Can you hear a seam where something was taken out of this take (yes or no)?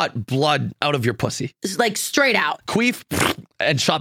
no